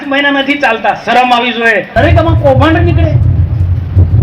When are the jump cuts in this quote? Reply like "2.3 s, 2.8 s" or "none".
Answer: 1.9 s